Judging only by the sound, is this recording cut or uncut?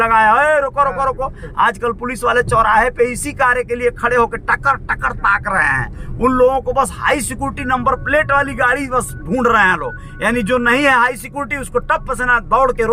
cut